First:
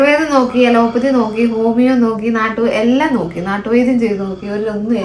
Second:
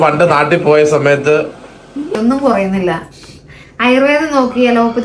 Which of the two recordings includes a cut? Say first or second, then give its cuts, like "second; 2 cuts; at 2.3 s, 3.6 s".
second; 1 cut; at 2.1 s